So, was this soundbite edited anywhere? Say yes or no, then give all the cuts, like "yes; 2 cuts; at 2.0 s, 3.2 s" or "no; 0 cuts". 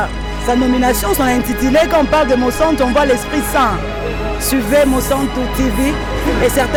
no; 0 cuts